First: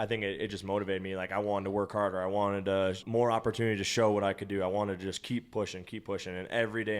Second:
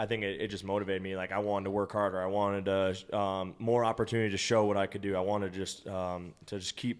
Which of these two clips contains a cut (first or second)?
first